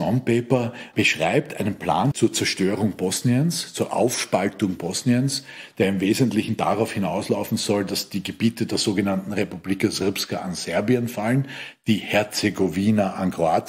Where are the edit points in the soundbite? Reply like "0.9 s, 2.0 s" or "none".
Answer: none